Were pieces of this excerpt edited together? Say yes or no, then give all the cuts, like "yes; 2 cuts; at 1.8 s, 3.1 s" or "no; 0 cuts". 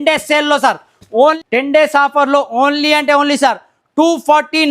yes; 1 cut; at 1.4 s